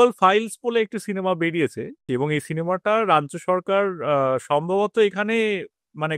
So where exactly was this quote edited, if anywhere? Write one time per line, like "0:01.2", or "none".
0:02.0